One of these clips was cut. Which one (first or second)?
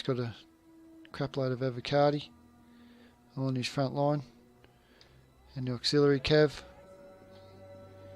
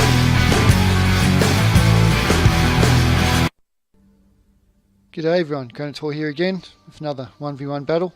first